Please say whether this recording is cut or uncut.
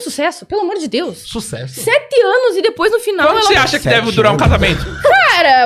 uncut